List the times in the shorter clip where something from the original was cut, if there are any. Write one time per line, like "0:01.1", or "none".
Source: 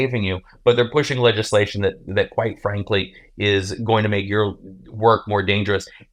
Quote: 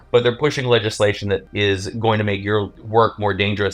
0:01.5
0:02.8